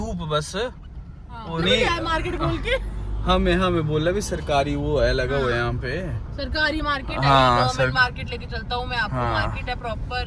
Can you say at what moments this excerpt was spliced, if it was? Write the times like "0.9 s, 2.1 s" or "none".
1.6 s